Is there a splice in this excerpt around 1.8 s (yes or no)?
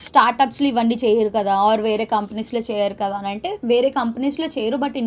no